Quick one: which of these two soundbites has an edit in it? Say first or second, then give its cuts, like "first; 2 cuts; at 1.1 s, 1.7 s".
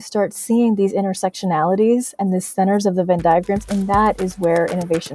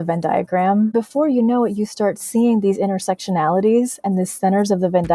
second; 1 cut; at 0.9 s